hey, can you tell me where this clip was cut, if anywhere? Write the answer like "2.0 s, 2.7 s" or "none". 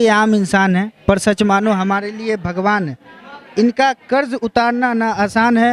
none